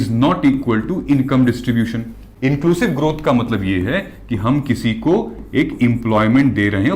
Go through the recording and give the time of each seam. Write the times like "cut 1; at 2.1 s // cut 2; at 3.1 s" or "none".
cut 1; at 2.2 s

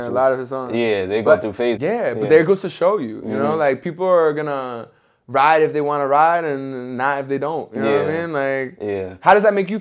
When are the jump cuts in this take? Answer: cut 1; at 1.8 s

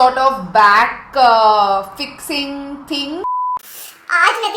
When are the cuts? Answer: cut 1; at 3.4 s

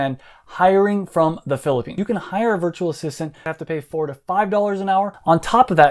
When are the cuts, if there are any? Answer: none

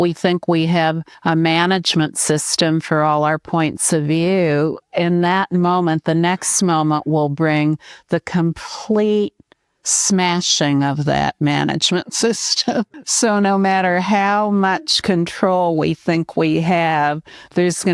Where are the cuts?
cut 1; at 1.1 s // cut 2; at 13.0 s

